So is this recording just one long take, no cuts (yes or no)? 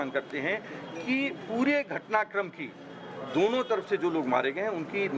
yes